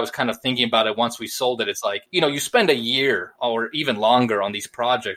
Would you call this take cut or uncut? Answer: cut